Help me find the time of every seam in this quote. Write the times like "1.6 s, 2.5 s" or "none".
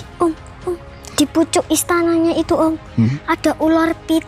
1.0 s